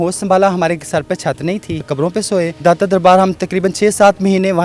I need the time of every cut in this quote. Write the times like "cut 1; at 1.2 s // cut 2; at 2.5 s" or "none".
cut 1; at 2.2 s